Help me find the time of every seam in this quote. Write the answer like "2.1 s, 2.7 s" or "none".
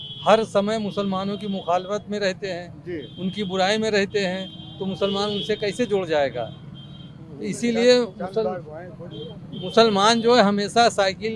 none